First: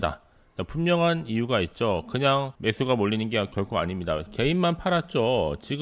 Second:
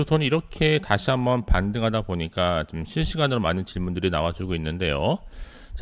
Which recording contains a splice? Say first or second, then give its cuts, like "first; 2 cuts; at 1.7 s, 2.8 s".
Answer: first; 1 cut; at 2.5 s